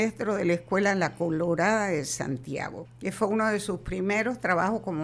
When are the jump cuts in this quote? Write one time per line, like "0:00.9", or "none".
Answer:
0:02.8